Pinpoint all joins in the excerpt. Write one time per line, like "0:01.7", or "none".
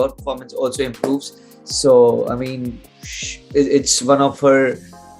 none